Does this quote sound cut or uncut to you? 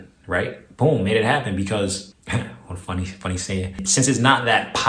cut